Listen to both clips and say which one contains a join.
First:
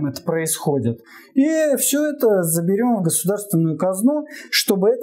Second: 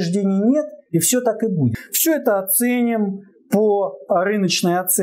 second; 1 cut; at 1.8 s

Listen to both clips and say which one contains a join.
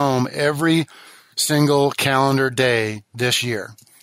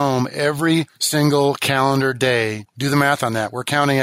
second; 2 cuts; at 1.0 s, 2.7 s

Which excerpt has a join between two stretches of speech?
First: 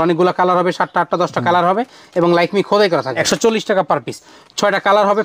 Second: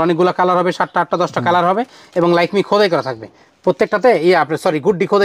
first; 1 cut; at 3.2 s

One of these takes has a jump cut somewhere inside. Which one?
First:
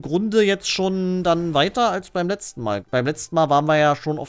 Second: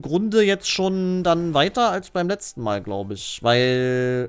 first; 1 cut; at 2.8 s

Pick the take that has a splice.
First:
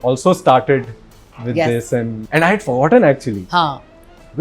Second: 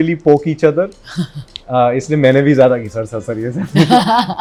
first; 1 cut; at 2.2 s

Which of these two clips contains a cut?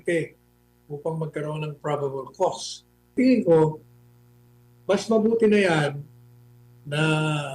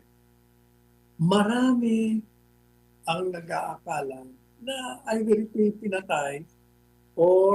first; 1 cut; at 3.2 s

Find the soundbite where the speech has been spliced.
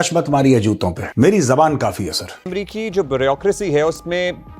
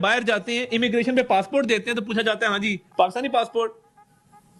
first; 2 cuts; at 1.0 s, 2.5 s

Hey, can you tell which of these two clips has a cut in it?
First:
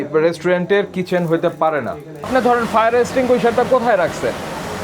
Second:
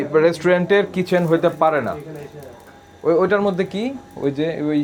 first; 1 cut; at 2.2 s

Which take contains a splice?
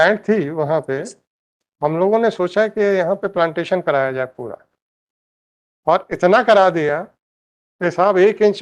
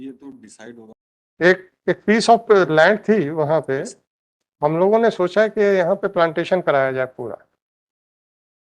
second; 1 cut; at 0.9 s

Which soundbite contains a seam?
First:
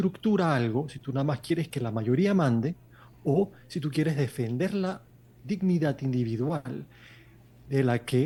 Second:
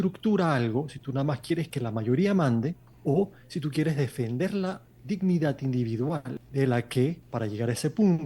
second; 3 cuts; at 2.9 s, 4.9 s, 6.4 s

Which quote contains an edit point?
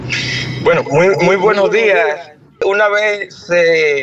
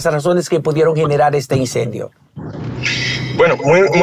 first; 1 cut; at 2.6 s

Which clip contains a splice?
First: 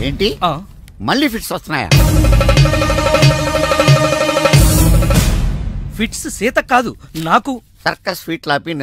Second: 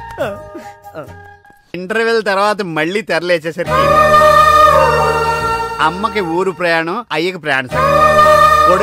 second; 1 cut; at 1.7 s

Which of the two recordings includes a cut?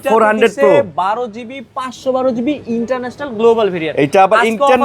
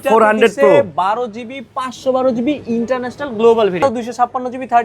second; 1 cut; at 3.8 s

